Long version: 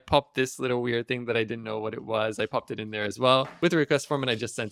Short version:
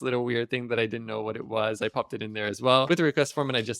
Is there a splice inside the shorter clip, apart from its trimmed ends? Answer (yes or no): yes